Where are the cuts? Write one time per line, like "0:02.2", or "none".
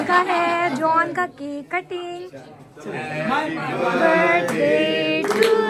none